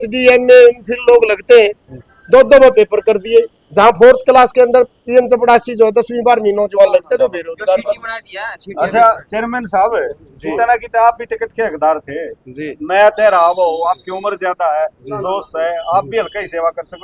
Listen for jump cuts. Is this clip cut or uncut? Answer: uncut